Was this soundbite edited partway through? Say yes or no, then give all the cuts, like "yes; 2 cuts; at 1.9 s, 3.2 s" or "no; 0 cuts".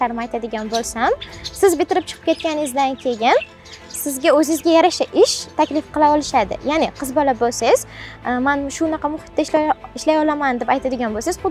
no; 0 cuts